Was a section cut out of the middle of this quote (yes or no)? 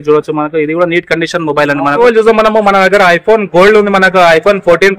yes